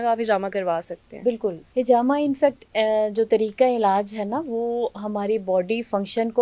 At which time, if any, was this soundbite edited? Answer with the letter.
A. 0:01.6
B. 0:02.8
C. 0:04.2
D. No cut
A